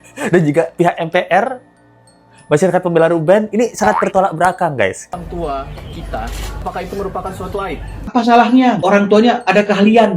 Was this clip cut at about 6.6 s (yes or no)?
yes